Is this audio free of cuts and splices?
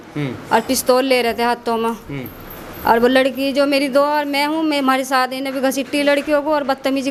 yes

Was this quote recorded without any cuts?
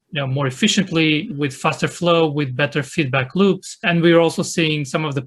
yes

